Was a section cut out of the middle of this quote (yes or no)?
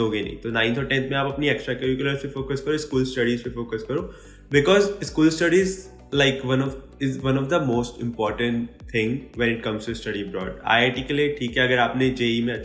no